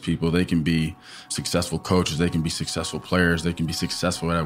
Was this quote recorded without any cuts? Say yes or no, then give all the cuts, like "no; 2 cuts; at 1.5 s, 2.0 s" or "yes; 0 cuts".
no; 1 cut; at 1.3 s